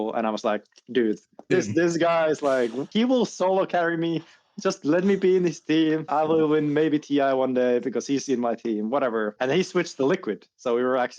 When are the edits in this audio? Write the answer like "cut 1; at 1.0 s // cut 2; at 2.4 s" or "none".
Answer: cut 1; at 1.4 s // cut 2; at 2.8 s // cut 3; at 6.1 s // cut 4; at 9.3 s